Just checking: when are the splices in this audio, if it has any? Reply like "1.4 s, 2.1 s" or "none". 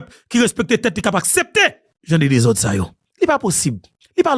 none